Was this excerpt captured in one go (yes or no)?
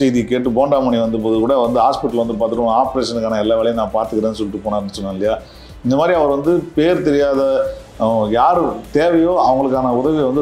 yes